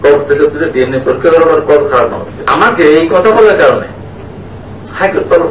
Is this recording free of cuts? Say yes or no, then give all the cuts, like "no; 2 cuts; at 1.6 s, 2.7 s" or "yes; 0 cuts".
no; 1 cut; at 2.5 s